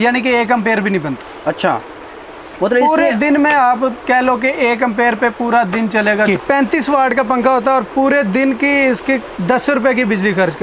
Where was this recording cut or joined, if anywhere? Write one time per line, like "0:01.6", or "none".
0:06.3
0:09.3